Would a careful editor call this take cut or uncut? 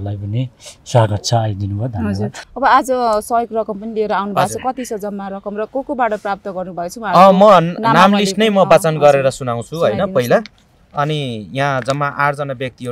cut